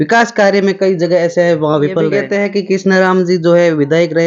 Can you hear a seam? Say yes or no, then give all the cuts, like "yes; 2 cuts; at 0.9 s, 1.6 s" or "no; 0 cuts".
yes; 1 cut; at 2.2 s